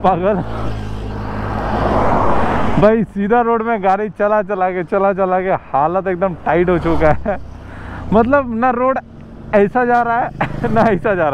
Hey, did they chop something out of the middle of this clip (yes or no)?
no